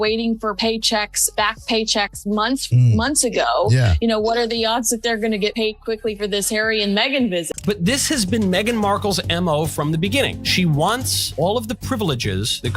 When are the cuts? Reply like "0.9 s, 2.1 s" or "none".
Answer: 7.5 s